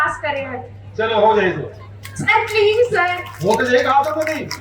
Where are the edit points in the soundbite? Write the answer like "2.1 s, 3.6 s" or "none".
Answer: none